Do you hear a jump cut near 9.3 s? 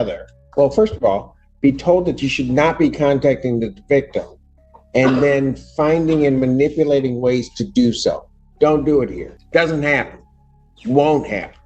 yes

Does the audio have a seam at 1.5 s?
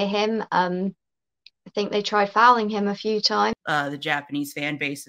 no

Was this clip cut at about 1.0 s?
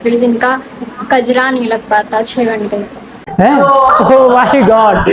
no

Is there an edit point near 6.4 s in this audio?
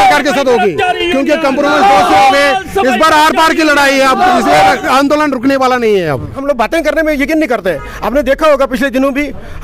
yes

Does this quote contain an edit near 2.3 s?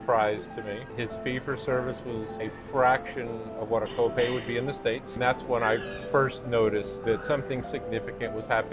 yes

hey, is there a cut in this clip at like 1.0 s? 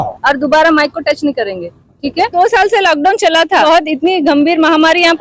no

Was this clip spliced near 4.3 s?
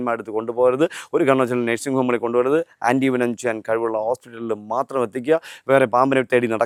no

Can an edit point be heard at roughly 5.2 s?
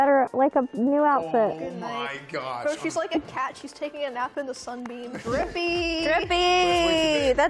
yes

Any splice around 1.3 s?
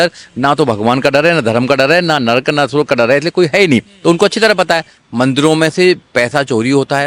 no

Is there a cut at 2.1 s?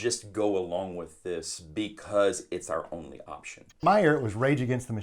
no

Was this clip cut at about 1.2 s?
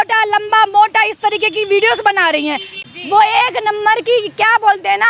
no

